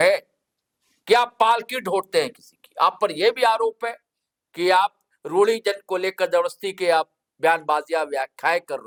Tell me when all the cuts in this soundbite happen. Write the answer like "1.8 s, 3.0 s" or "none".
none